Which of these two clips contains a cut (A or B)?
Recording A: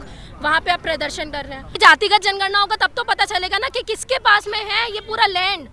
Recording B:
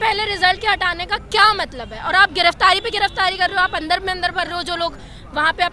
A